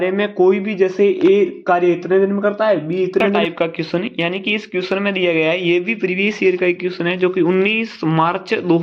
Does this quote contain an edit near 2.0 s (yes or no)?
no